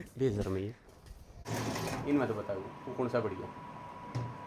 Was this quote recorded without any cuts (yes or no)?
no